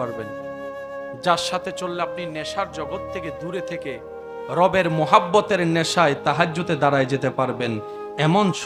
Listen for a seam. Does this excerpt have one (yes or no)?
no